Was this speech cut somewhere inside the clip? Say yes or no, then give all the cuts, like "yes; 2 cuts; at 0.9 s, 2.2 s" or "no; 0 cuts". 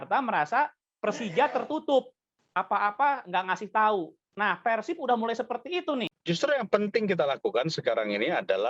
yes; 1 cut; at 6.1 s